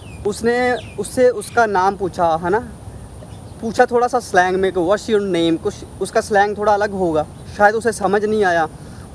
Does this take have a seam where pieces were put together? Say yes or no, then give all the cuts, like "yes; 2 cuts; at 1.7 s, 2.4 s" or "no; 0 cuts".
no; 0 cuts